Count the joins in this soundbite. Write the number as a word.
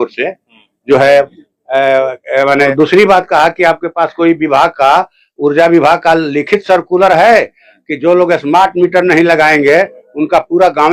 one